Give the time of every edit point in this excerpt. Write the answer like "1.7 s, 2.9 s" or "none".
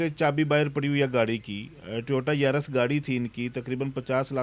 none